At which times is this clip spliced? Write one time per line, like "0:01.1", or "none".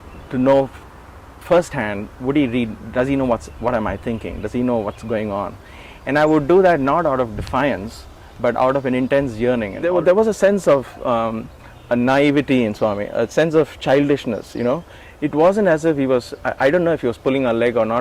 0:09.7